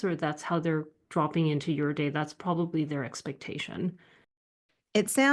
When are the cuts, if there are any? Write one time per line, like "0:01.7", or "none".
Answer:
0:04.3